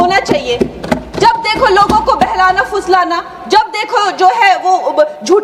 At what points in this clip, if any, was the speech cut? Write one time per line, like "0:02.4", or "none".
none